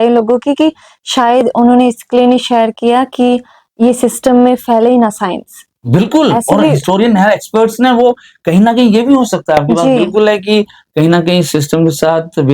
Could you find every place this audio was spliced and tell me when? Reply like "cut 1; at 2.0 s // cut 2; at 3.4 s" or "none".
none